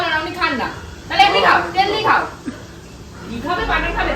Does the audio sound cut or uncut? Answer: uncut